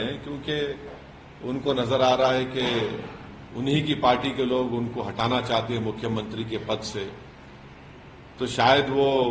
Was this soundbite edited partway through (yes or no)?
no